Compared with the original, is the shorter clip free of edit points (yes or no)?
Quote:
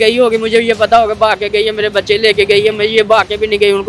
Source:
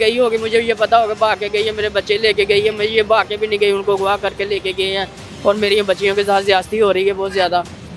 yes